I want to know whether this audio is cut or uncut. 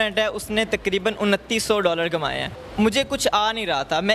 cut